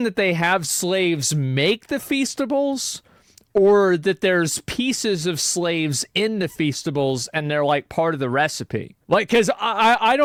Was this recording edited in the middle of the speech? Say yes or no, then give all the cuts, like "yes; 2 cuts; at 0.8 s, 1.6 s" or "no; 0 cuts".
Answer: no; 0 cuts